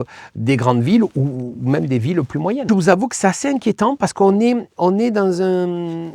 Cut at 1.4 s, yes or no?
no